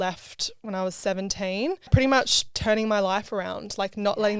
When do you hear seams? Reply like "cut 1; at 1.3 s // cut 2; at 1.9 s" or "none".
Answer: cut 1; at 2.1 s